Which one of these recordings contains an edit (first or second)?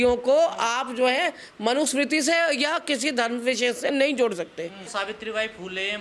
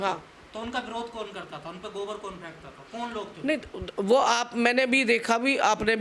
first